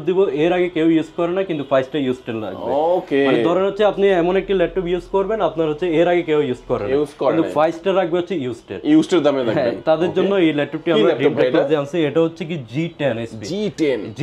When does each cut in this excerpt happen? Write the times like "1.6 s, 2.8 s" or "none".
none

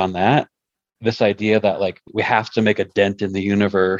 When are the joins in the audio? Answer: 2.0 s

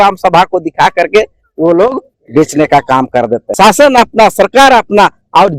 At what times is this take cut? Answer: 3.4 s

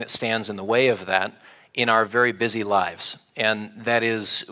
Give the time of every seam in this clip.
none

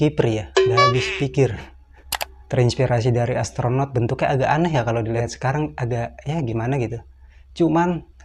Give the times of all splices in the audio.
none

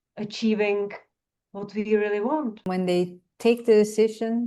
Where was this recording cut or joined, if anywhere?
2.6 s

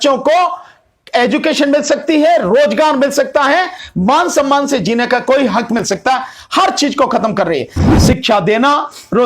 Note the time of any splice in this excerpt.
7.8 s

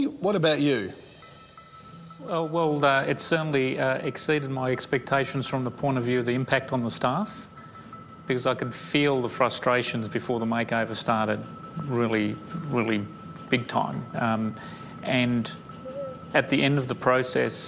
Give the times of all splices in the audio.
8.1 s

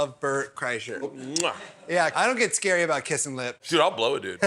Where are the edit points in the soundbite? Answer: 1.1 s, 2.1 s, 3.6 s

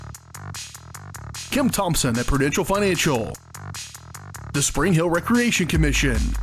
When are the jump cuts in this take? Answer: 1.0 s

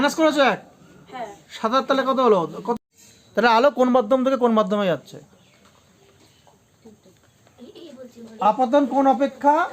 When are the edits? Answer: 2.8 s

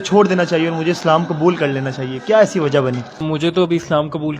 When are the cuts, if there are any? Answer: 3.2 s

